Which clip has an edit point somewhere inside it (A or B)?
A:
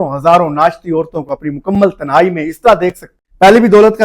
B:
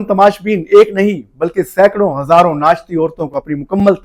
A